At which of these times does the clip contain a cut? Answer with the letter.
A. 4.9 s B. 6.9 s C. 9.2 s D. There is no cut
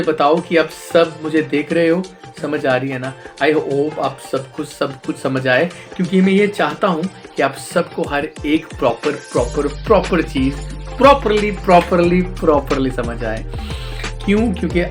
D